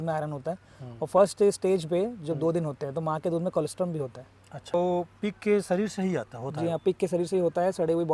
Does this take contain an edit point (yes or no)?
yes